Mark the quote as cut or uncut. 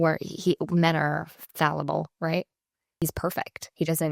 cut